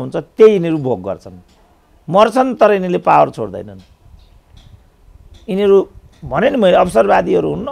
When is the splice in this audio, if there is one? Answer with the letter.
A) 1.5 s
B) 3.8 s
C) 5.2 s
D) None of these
D